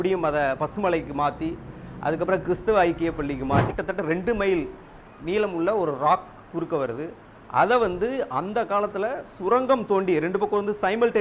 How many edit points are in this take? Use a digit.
1